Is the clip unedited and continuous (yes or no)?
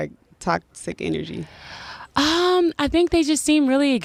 yes